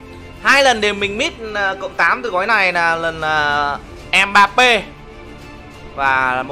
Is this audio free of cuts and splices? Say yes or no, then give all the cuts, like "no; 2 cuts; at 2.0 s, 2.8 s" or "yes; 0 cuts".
yes; 0 cuts